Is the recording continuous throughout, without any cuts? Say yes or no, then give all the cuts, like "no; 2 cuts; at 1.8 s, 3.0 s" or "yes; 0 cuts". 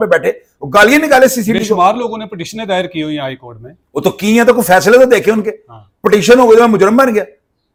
yes; 0 cuts